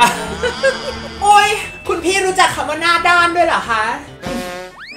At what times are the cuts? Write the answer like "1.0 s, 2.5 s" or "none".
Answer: 1.0 s